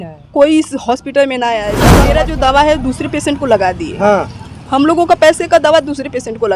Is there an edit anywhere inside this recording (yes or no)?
yes